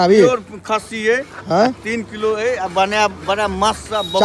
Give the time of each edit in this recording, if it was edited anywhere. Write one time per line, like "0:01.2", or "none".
none